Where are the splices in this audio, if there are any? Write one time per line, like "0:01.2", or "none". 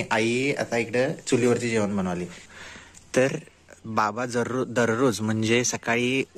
0:02.4